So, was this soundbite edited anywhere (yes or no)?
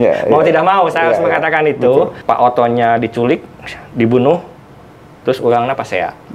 yes